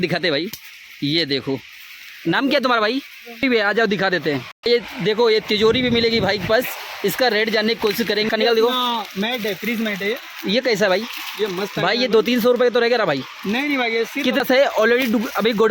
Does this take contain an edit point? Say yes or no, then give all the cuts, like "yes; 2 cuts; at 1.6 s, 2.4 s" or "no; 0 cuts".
yes; 3 cuts; at 3.4 s, 8.3 s, 14.4 s